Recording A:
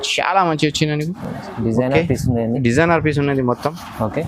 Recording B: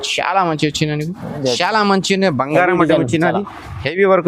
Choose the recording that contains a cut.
B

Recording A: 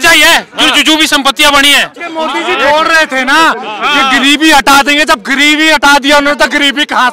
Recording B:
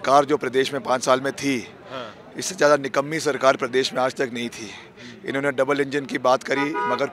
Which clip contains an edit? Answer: A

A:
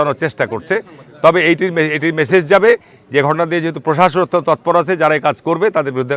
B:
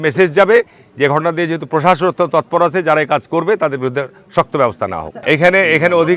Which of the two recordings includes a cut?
B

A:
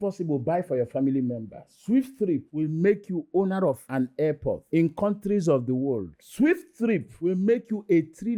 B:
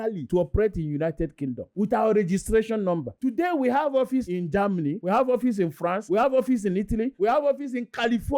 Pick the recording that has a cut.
B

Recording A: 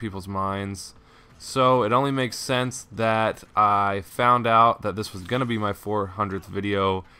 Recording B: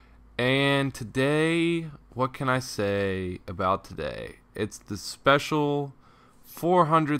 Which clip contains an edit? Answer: B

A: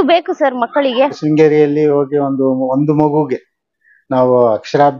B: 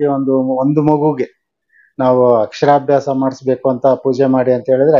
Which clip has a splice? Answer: A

